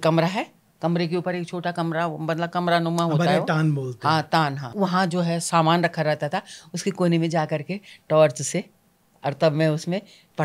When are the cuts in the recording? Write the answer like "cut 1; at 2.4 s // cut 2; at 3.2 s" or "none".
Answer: cut 1; at 4.7 s